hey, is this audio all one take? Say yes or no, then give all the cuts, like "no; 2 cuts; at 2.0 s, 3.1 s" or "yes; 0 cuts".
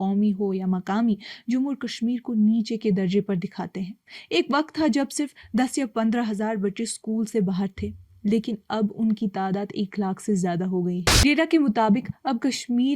no; 1 cut; at 11.1 s